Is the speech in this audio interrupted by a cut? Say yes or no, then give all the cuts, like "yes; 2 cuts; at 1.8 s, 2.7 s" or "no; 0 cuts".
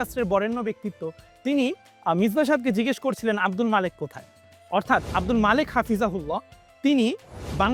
no; 0 cuts